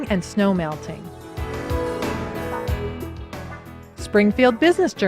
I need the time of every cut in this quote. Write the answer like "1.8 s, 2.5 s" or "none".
0.9 s, 4.0 s